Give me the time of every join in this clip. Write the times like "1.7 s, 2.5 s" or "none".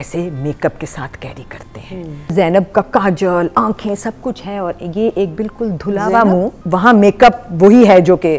2.5 s, 6.6 s